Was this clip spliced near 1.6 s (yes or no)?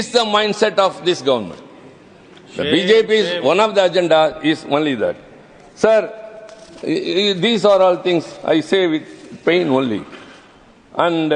no